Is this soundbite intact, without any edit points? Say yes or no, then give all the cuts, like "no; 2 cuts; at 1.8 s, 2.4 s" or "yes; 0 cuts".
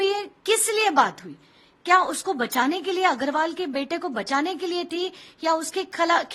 yes; 0 cuts